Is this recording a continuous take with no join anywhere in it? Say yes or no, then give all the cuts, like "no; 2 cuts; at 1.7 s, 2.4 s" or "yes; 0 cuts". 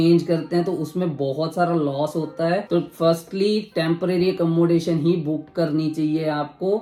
yes; 0 cuts